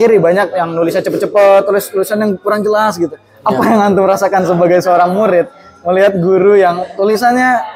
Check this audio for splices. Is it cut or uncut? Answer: uncut